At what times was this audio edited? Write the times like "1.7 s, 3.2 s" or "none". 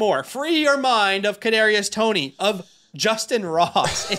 none